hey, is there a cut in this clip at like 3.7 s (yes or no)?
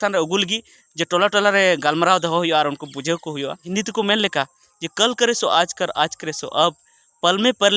yes